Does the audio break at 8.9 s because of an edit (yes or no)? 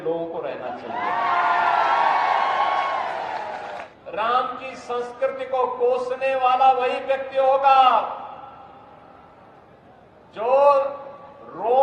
no